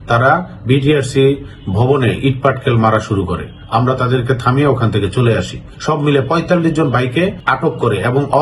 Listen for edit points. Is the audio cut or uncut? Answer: cut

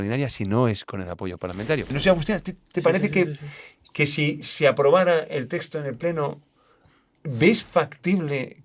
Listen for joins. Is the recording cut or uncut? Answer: cut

